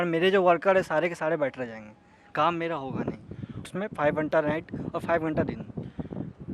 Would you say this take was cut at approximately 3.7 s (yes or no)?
yes